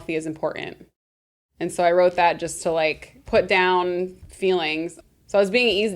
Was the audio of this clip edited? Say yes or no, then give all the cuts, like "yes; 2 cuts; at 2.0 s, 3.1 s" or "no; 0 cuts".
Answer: yes; 3 cuts; at 3.1 s, 4.2 s, 4.9 s